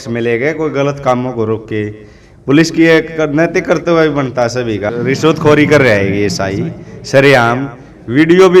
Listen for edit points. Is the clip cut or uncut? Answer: cut